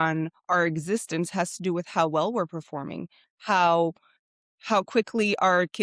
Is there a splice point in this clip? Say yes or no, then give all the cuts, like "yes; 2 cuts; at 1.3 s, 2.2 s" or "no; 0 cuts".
no; 0 cuts